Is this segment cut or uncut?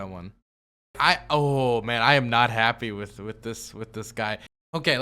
cut